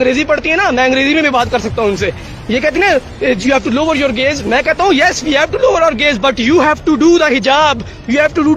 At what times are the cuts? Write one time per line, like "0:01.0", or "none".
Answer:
none